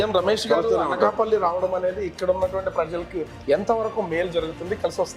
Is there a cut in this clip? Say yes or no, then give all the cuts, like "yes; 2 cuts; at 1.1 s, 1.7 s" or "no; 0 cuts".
no; 0 cuts